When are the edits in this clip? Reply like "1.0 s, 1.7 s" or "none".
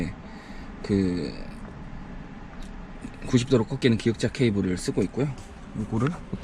none